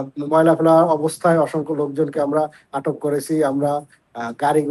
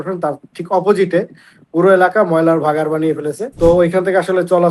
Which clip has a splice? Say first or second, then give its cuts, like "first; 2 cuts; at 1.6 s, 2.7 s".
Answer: second; 1 cut; at 3.4 s